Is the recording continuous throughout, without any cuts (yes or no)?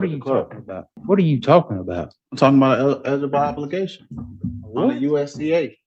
no